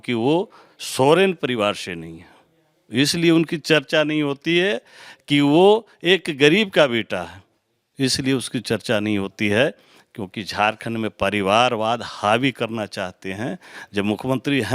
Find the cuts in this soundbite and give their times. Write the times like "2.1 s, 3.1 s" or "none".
none